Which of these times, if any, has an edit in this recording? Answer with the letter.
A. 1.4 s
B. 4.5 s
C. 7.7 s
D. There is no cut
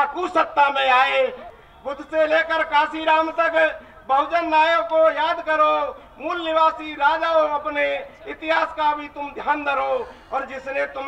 A